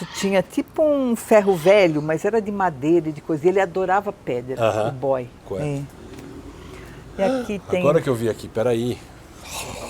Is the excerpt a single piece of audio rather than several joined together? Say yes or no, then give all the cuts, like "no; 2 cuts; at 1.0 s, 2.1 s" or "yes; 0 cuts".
no; 1 cut; at 5.4 s